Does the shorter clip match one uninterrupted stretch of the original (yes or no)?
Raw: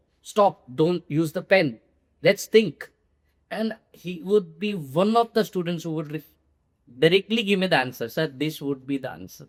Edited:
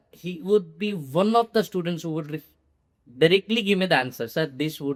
yes